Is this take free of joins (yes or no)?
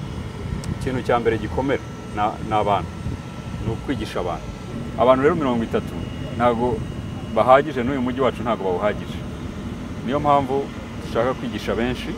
no